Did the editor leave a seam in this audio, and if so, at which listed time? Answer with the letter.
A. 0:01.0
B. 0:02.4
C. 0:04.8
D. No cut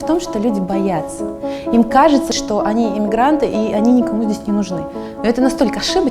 B